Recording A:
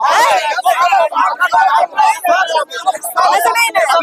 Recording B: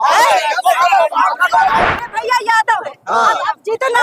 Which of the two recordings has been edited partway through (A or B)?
B